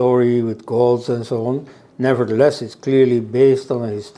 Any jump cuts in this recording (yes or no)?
no